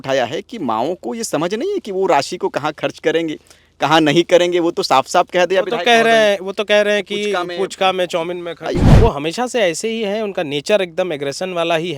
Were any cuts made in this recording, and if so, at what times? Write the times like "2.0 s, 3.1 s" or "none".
8.9 s